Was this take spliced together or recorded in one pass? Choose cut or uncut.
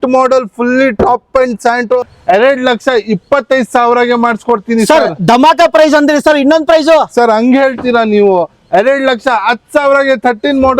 cut